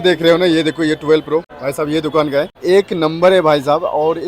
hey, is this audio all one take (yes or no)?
no